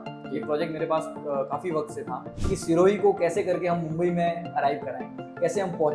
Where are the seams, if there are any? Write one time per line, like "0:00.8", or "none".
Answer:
0:02.3